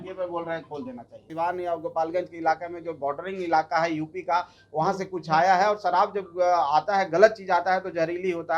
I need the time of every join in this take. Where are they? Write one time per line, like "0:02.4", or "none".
0:01.2